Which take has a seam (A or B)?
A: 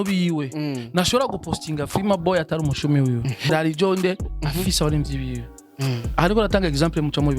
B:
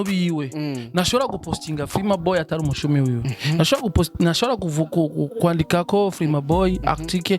A